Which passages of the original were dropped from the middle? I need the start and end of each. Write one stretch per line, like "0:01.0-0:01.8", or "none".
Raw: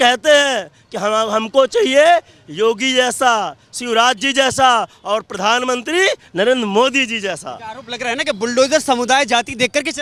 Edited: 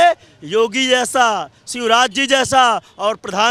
none